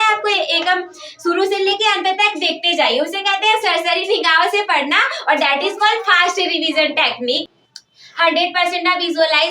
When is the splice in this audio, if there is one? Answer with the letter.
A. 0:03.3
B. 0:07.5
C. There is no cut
B